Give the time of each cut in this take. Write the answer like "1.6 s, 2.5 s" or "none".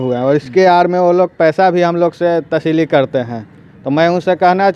none